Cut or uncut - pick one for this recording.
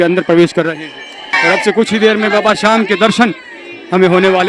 cut